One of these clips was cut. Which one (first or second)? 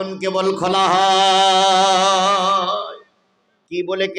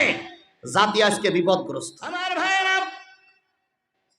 second